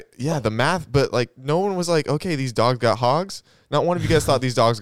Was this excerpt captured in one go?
yes; 0 cuts

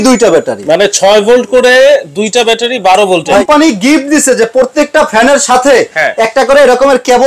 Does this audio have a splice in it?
yes; 1 cut; at 3.4 s

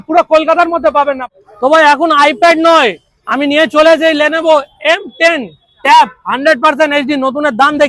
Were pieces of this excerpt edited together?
yes; 1 cut; at 1.3 s

